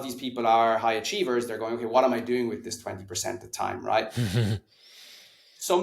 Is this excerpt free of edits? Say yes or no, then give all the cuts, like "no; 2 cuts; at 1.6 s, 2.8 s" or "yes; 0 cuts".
yes; 0 cuts